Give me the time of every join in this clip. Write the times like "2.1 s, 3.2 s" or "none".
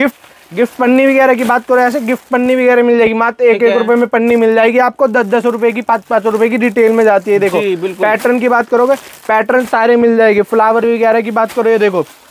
none